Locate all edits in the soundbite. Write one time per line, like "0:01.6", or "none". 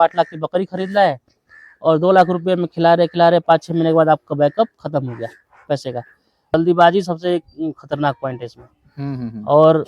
0:06.5